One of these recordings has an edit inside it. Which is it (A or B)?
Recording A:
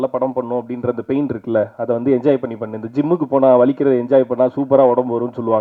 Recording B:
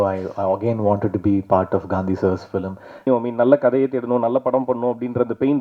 B